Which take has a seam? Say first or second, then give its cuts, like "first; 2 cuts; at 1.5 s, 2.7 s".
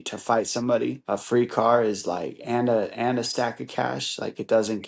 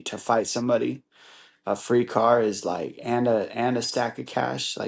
first; 1 cut; at 1.0 s